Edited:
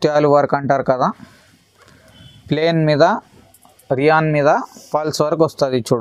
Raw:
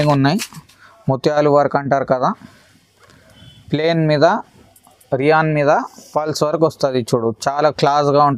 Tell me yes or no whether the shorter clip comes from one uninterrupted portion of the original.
yes